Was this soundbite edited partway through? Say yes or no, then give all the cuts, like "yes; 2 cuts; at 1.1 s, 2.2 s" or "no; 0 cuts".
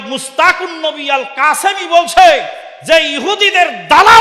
no; 0 cuts